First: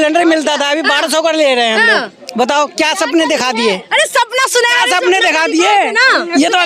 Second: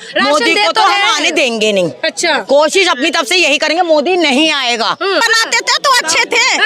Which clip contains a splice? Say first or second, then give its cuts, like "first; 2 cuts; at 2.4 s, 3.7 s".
second; 1 cut; at 5.2 s